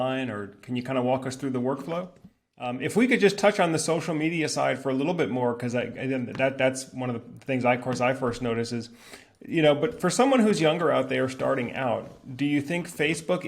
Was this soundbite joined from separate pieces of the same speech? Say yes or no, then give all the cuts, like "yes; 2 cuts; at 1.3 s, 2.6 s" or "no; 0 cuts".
yes; 1 cut; at 2.7 s